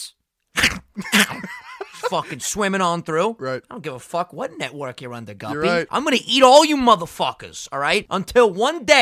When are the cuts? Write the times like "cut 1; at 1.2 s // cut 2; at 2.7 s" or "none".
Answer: cut 1; at 5.9 s // cut 2; at 8.1 s